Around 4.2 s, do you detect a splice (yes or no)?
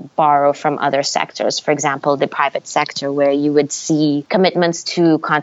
yes